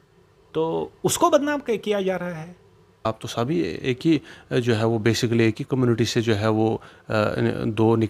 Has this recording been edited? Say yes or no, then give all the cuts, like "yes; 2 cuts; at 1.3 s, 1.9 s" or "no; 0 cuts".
yes; 1 cut; at 3.0 s